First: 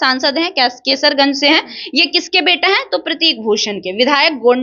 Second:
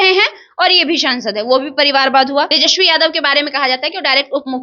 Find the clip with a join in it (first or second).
second